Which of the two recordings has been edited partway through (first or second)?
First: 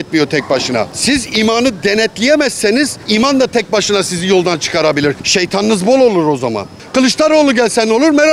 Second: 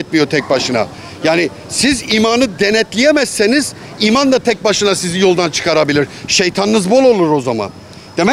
first